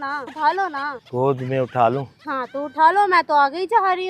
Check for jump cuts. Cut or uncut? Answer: cut